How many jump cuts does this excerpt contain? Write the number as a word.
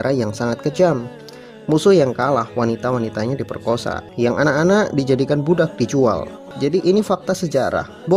two